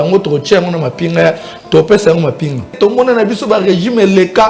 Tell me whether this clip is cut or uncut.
cut